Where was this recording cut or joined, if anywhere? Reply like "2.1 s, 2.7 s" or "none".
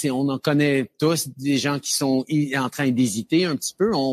none